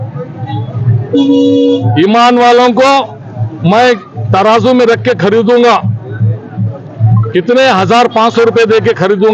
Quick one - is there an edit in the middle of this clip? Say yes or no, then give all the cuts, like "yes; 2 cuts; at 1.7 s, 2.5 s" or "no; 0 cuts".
no; 0 cuts